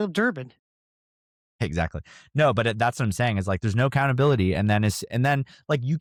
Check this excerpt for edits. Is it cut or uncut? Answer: uncut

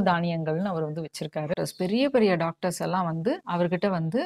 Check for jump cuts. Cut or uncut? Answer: cut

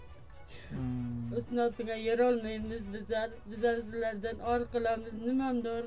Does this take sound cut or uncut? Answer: uncut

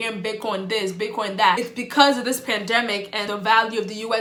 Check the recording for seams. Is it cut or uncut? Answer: uncut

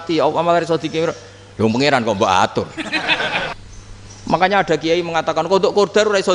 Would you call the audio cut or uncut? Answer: cut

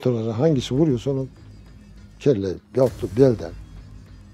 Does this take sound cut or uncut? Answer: uncut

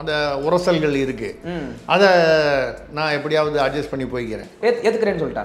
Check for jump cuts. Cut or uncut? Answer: cut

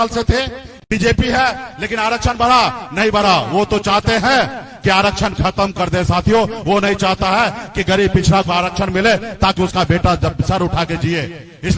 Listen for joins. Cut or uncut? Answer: uncut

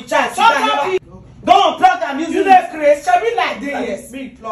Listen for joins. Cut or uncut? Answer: cut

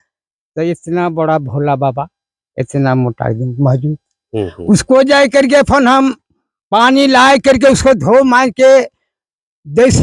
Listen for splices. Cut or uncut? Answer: uncut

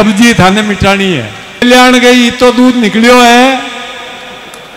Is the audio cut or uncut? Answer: cut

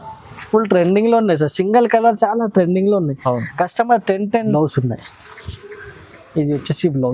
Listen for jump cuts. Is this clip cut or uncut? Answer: cut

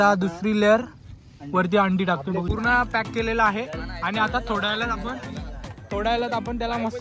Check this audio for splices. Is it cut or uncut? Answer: cut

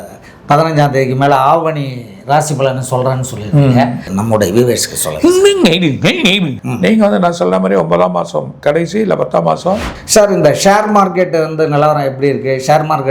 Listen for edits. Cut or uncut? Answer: cut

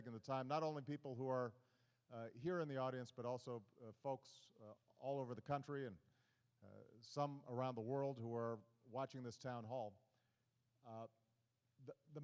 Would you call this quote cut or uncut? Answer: cut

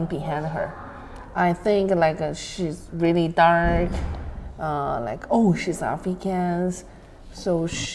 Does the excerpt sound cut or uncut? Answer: uncut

